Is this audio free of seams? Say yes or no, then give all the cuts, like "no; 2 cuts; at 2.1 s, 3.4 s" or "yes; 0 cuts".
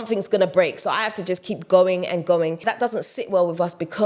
no; 1 cut; at 2.6 s